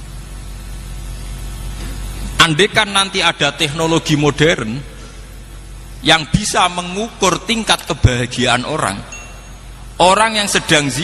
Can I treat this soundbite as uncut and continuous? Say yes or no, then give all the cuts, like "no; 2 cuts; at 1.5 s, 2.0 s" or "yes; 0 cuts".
yes; 0 cuts